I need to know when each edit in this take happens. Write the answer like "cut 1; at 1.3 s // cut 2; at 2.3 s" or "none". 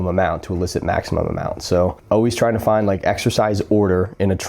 cut 1; at 2.0 s